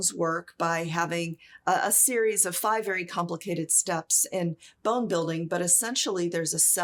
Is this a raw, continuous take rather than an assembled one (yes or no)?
yes